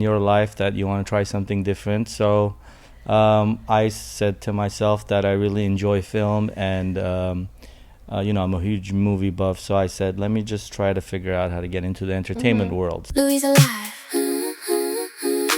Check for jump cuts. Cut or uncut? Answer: cut